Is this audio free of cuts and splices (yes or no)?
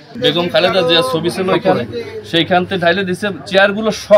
yes